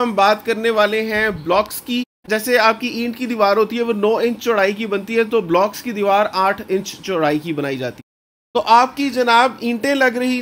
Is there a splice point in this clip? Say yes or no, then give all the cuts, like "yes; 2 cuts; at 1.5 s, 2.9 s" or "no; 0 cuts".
yes; 2 cuts; at 2.2 s, 8.0 s